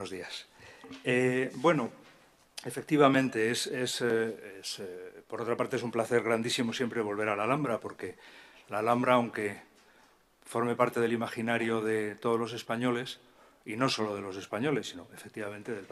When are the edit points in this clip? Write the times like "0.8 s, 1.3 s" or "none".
none

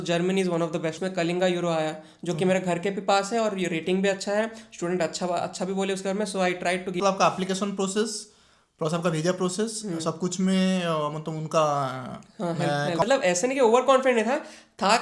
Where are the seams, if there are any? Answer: 1.0 s, 7.0 s, 13.0 s

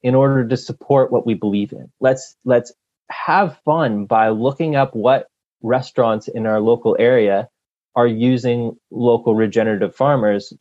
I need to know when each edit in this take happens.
none

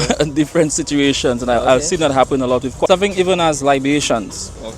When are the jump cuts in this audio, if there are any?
2.9 s

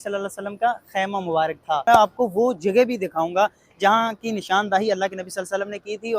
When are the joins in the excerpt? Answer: 1.8 s

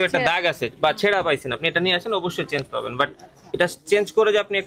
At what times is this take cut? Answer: none

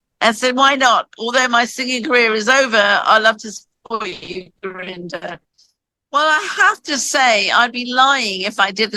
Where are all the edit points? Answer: 6.0 s

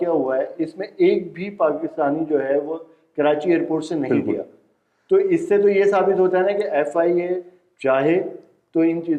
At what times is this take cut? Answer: none

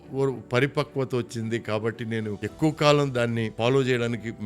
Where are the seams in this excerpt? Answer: 2.4 s, 3.5 s

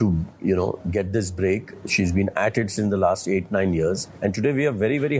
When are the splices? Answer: 4.1 s

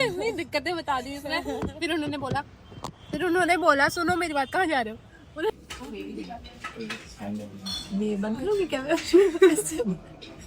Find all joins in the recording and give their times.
5.5 s

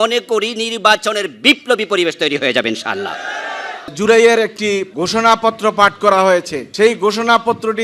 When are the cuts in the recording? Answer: 3.9 s, 4.9 s, 6.6 s

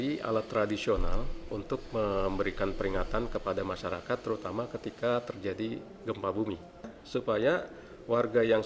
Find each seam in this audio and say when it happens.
7.0 s

